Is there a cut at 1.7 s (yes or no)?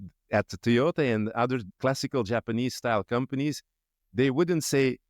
yes